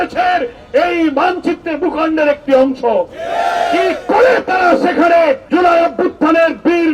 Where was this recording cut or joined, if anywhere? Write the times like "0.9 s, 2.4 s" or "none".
5.4 s